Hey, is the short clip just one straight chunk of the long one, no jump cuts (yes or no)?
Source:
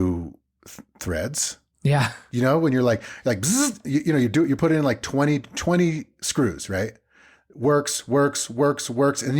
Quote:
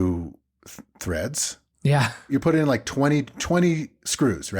no